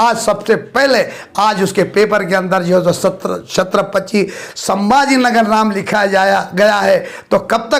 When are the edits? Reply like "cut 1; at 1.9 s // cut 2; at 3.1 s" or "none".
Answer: none